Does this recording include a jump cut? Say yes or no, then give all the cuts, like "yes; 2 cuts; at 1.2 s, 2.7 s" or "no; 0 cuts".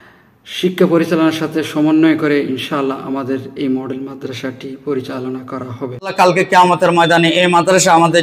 yes; 1 cut; at 6.1 s